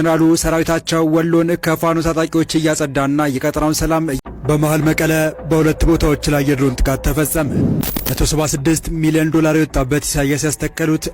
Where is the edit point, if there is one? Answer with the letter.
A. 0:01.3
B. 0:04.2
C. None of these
B